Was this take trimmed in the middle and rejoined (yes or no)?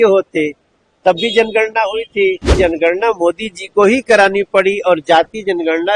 yes